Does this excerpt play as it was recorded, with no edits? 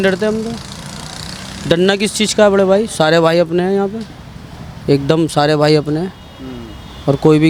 yes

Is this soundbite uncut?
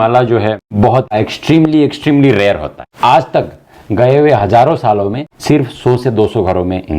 no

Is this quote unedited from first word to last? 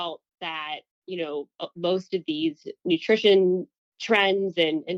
yes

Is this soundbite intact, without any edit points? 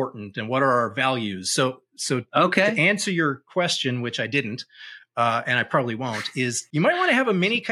no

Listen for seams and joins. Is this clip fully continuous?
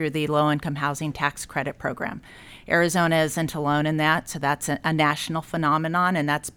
yes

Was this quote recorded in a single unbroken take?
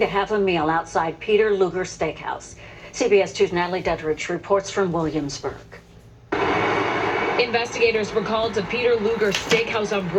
no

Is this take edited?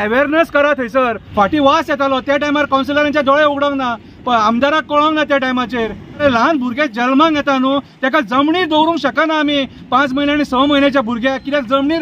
yes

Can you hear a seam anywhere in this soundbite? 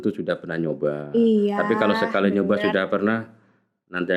no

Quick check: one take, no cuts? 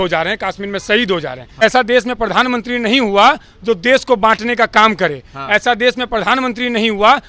no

